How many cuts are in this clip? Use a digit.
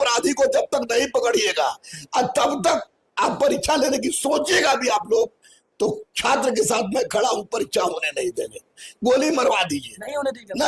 0